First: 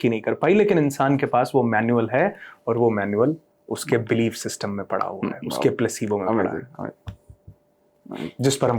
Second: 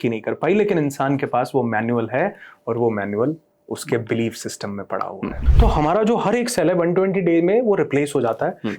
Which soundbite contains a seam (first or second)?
second